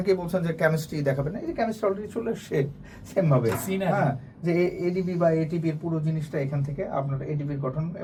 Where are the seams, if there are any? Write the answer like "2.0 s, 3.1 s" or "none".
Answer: none